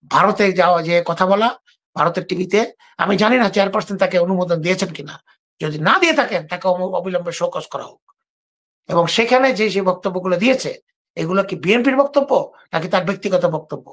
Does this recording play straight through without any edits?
yes; 0 cuts

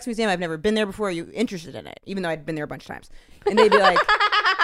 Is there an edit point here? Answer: no; 0 cuts

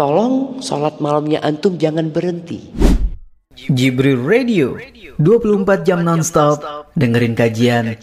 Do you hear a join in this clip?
yes; 1 cut; at 2.7 s

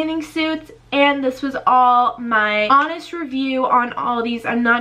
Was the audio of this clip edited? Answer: yes; 1 cut; at 2.7 s

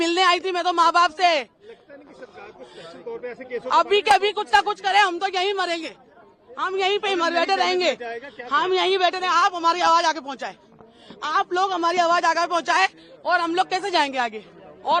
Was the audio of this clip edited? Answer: no; 0 cuts

